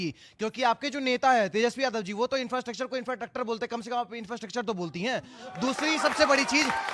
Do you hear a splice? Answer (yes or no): yes